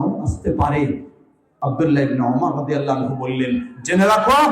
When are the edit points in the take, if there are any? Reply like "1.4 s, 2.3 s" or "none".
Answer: 1.5 s